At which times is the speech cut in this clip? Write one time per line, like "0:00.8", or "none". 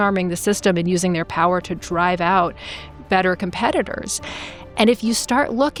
none